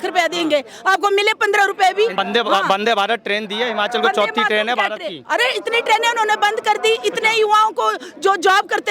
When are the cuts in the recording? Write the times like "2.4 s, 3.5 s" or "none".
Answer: 2.2 s